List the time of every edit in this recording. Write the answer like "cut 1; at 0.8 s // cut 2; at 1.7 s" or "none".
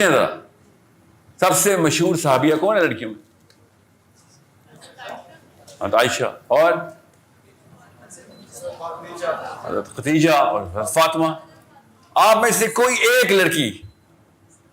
none